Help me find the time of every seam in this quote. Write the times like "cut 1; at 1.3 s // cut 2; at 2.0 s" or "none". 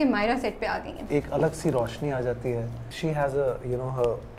cut 1; at 0.9 s // cut 2; at 2.8 s